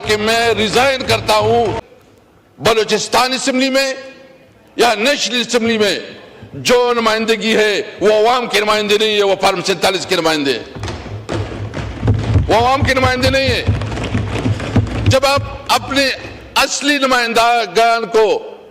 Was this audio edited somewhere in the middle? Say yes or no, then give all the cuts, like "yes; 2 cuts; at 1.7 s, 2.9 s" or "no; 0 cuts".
yes; 1 cut; at 1.9 s